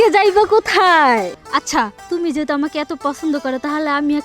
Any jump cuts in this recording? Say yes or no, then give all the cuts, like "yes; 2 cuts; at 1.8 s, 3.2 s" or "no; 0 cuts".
yes; 1 cut; at 1.3 s